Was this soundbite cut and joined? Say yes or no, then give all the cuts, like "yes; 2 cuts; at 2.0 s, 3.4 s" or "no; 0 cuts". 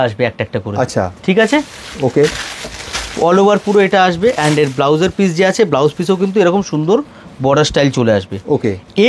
no; 0 cuts